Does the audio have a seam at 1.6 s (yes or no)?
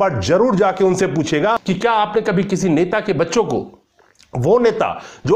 yes